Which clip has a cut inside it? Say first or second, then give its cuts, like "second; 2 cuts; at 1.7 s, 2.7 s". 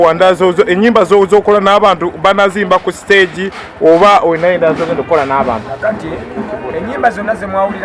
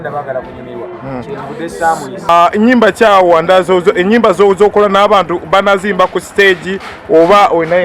second; 1 cut; at 2.3 s